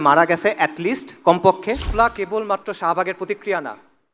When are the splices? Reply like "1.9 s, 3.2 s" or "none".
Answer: 1.9 s